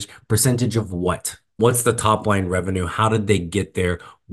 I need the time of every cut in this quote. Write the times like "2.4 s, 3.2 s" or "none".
1.6 s